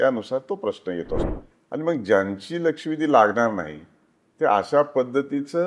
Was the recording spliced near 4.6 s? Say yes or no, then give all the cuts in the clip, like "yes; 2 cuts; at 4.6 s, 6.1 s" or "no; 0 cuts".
no; 1 cut; at 1.2 s